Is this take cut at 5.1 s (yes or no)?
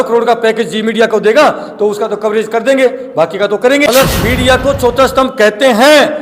no